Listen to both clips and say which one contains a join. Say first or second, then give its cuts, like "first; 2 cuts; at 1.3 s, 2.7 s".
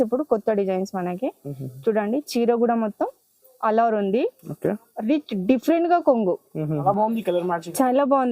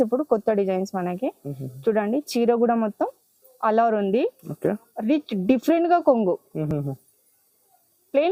first; 1 cut; at 6.6 s